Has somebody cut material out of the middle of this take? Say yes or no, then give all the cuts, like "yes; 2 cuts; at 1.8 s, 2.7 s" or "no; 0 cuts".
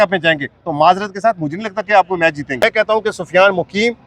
yes; 1 cut; at 2.5 s